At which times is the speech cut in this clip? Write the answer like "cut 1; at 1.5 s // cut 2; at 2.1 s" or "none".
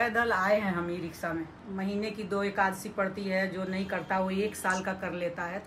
cut 1; at 1.6 s